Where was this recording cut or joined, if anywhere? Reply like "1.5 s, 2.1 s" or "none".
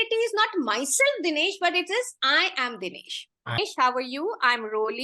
3.6 s